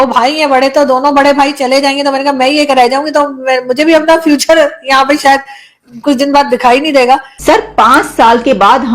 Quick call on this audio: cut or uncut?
cut